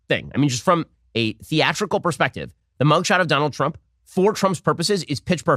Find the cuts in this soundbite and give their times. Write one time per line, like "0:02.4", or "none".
none

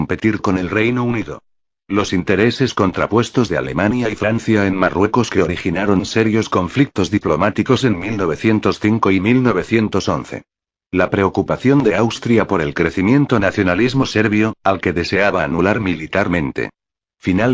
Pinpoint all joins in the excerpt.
none

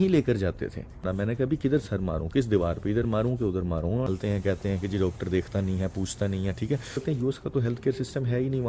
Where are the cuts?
0:01.0
0:04.1
0:07.0

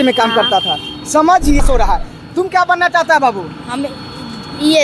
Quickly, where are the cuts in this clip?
0:01.6

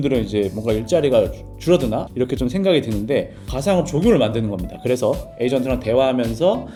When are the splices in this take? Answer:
none

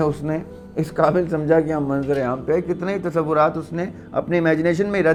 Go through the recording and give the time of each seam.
none

